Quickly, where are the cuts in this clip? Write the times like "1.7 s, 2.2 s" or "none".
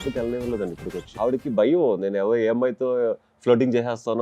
1.0 s